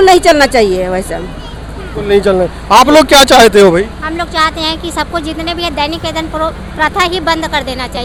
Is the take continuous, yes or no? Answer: yes